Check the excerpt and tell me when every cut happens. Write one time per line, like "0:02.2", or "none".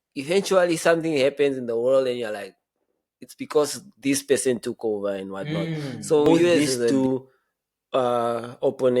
0:06.9